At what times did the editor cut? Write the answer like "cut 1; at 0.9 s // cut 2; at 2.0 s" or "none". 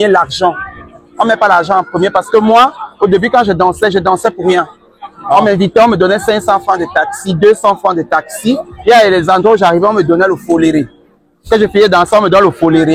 none